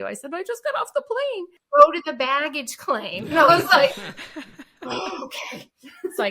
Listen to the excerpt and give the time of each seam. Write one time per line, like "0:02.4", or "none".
0:01.5